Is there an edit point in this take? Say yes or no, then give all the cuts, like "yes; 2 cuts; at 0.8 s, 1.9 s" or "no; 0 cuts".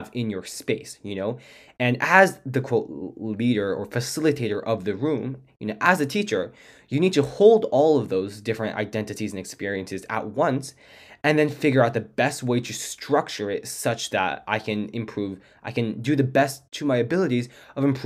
no; 0 cuts